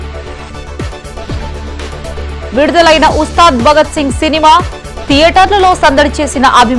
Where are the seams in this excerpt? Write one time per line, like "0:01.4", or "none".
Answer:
none